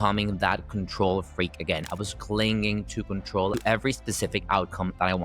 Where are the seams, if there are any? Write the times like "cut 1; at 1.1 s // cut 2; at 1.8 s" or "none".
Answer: cut 1; at 3.6 s